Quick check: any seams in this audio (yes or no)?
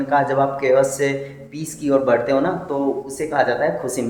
no